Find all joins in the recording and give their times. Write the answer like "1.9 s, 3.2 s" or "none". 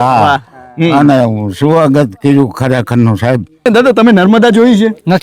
3.7 s

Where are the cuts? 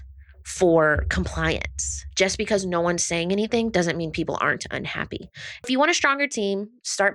2.0 s, 5.7 s

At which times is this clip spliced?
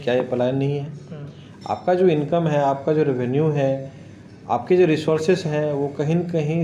none

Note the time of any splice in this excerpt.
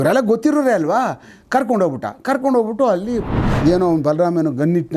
3.4 s

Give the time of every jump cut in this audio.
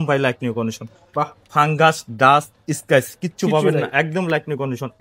none

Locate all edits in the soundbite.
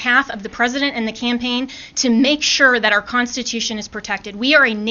none

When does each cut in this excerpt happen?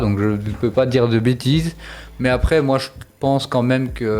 none

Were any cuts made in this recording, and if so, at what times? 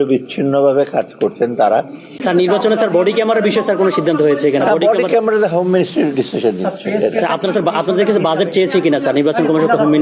2.2 s

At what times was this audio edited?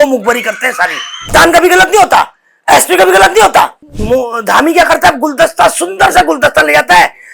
1.3 s, 3.9 s

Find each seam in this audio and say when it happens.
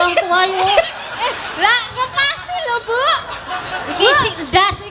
none

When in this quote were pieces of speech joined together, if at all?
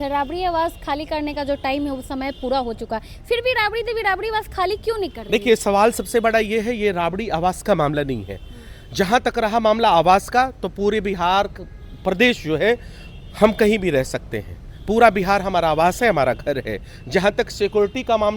none

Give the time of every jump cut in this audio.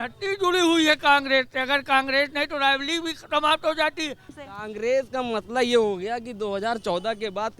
4.3 s

